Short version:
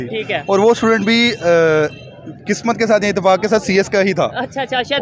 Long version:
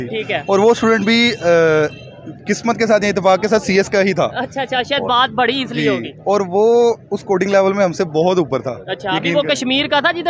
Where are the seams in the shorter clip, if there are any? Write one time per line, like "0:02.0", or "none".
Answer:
none

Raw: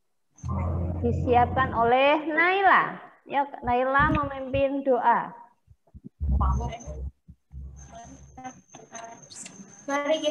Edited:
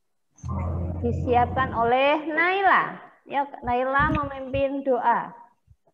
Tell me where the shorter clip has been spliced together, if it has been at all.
none

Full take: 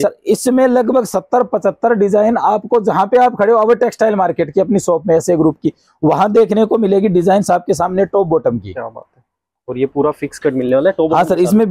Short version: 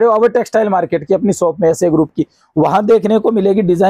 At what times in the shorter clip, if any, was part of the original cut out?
none

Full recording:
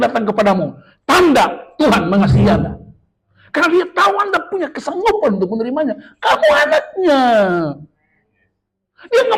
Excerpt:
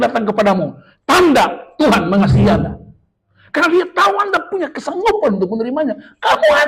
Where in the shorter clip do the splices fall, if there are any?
none

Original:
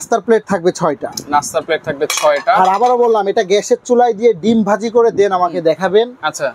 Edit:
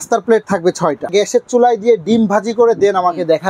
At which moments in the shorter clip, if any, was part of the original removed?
0:01.1

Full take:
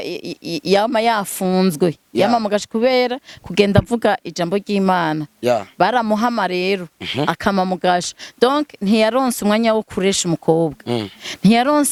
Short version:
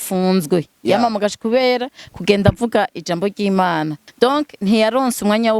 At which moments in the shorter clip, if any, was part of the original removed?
0:04.0

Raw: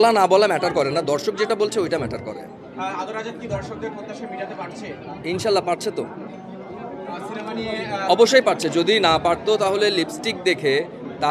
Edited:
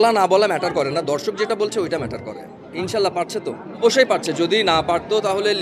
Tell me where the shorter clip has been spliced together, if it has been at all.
0:02.6
0:03.8

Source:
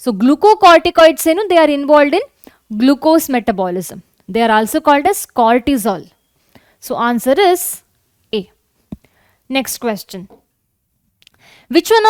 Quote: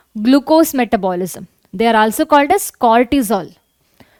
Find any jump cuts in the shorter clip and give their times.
none

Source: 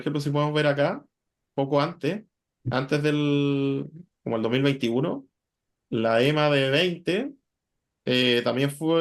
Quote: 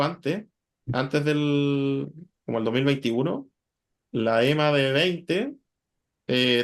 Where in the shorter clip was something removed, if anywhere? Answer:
none

